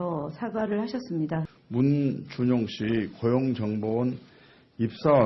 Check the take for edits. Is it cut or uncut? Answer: cut